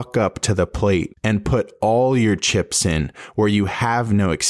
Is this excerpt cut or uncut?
cut